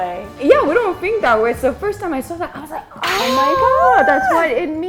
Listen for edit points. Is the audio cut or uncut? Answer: uncut